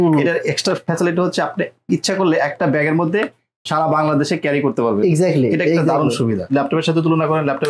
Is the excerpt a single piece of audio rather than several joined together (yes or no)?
no